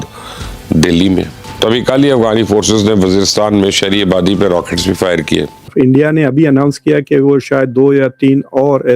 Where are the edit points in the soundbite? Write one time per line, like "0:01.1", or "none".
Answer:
0:01.6
0:05.6